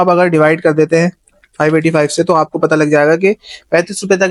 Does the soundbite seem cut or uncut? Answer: uncut